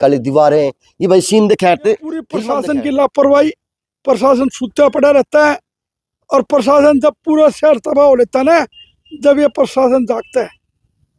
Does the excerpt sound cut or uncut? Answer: cut